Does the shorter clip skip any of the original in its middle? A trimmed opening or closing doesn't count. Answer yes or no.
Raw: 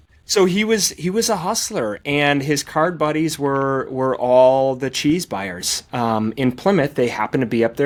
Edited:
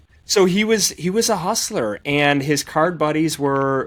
no